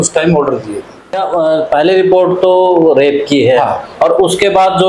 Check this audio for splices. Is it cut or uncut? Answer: cut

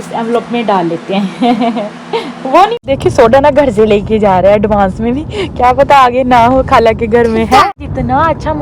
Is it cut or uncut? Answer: cut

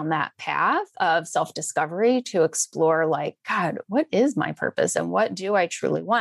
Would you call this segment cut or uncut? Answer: uncut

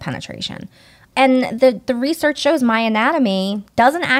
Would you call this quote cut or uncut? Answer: cut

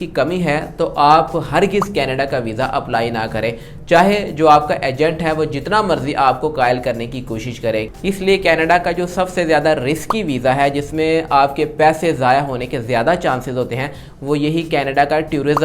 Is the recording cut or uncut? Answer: cut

